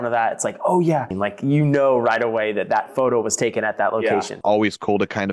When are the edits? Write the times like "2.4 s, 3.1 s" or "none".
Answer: 1.1 s, 4.3 s